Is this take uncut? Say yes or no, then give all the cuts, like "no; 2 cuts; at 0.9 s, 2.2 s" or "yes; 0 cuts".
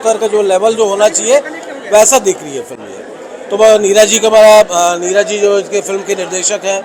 yes; 0 cuts